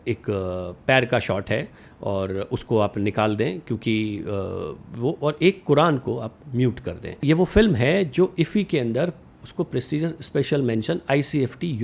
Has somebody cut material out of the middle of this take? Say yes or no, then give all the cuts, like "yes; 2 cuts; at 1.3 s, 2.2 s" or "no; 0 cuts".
yes; 1 cut; at 7.2 s